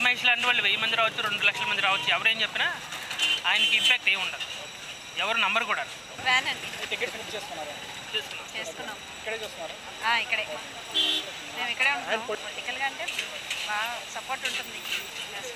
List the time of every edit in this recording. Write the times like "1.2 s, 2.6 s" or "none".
none